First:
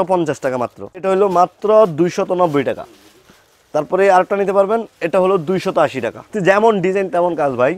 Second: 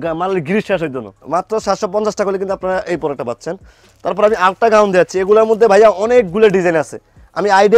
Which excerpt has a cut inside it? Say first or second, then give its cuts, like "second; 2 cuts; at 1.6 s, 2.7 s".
first; 2 cuts; at 1.0 s, 6.3 s